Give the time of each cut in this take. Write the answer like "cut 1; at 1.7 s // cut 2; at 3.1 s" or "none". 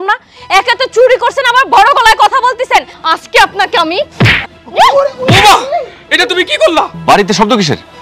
cut 1; at 6.9 s

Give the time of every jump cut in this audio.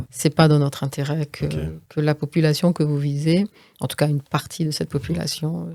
none

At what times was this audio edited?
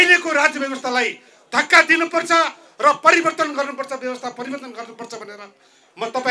none

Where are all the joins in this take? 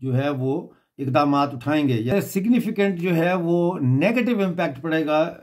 cut 1; at 2.1 s

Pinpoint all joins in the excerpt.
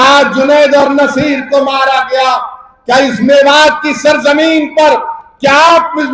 none

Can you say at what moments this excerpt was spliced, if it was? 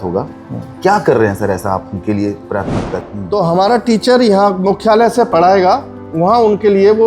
cut 1; at 2.9 s

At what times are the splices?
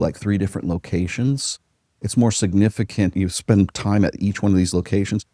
cut 1; at 3.1 s

